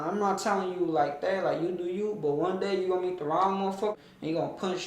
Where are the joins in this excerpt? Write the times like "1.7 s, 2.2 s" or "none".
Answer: 3.9 s